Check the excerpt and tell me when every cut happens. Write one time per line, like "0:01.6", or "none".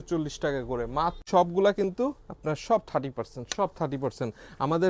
0:01.2